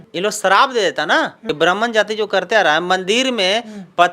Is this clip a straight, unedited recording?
no; 1 cut; at 1.4 s

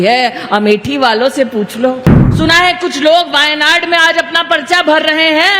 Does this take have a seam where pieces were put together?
yes; 1 cut; at 2.4 s

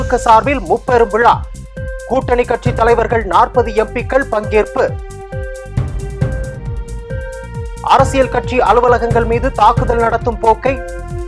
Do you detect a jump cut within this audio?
no; 0 cuts

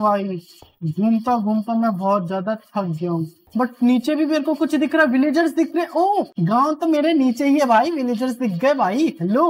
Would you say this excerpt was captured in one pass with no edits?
yes; 0 cuts

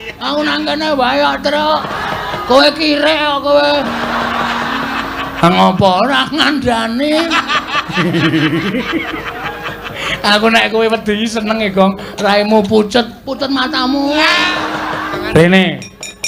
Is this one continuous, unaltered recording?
no; 2 cuts; at 1.9 s, 15.2 s

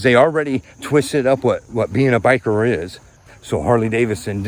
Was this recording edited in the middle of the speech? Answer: yes; 1 cut; at 3.3 s

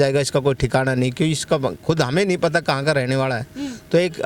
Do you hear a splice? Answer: no; 0 cuts

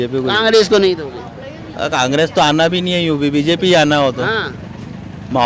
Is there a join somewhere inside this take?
no; 0 cuts

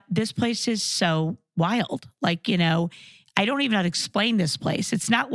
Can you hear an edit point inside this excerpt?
no; 0 cuts

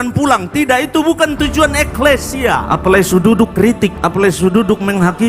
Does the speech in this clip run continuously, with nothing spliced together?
no; 2 cuts; at 2.7 s, 4.0 s

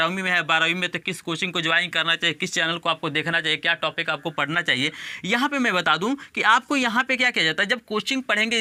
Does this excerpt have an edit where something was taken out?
no; 0 cuts

